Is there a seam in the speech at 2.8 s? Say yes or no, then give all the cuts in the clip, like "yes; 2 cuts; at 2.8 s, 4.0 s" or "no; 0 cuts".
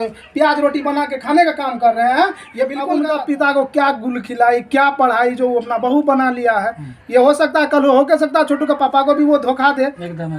yes; 1 cut; at 2.8 s